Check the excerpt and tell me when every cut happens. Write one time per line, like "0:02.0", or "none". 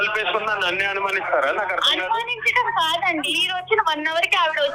0:03.4